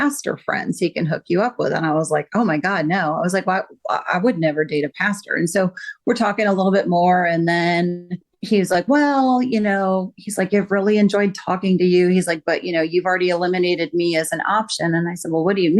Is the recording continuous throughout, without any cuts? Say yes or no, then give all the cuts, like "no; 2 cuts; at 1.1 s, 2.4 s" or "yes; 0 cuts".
yes; 0 cuts